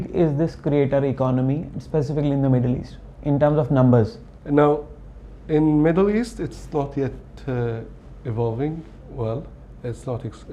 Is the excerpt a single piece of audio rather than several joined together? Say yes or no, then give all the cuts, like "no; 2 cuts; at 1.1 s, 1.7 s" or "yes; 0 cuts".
yes; 0 cuts